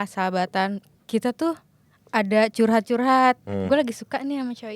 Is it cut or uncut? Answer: cut